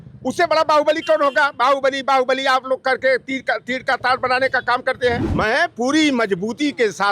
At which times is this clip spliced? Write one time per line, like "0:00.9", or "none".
0:05.3